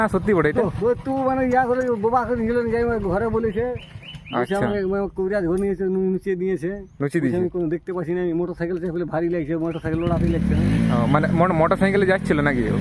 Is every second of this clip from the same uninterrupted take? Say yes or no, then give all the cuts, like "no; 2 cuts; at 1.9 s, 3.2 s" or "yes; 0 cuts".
yes; 0 cuts